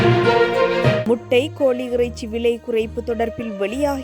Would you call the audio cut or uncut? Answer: cut